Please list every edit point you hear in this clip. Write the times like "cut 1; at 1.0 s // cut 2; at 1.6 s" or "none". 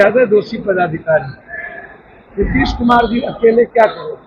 none